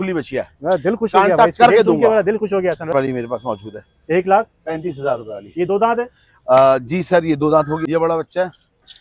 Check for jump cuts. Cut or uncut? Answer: cut